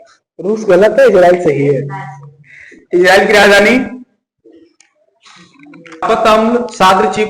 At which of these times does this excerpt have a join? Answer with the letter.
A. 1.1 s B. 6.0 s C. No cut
B